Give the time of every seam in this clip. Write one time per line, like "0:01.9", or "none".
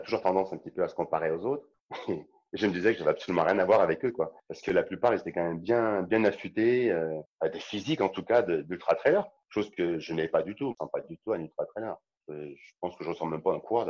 0:07.2
0:09.3
0:10.8
0:12.1